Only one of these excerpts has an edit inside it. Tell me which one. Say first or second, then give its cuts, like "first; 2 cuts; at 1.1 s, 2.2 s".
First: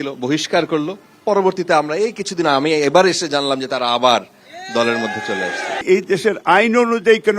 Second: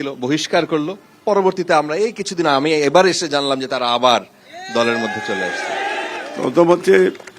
first; 1 cut; at 5.8 s